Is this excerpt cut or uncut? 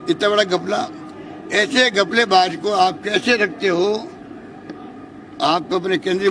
uncut